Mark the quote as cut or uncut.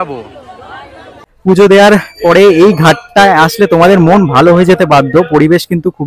cut